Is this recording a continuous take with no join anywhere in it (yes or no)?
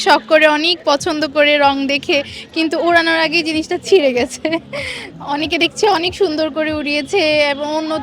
yes